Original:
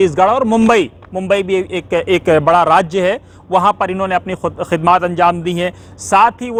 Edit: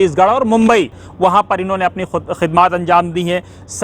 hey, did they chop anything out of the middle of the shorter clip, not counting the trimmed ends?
yes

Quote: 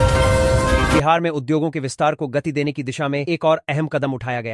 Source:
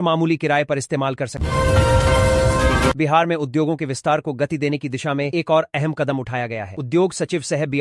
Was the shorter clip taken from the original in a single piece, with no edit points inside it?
no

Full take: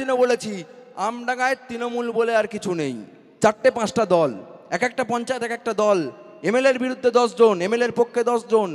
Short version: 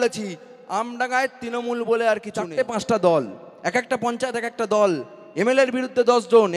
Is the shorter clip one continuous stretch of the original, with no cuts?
no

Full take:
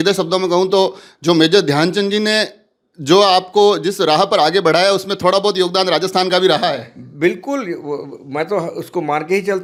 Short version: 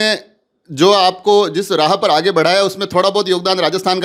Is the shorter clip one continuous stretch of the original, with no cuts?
yes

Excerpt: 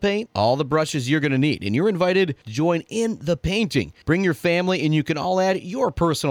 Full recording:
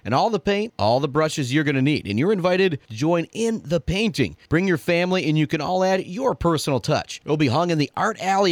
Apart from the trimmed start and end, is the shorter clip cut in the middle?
no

